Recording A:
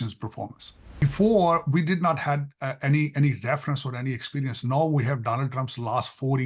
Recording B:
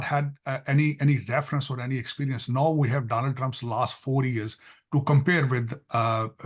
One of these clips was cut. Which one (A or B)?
A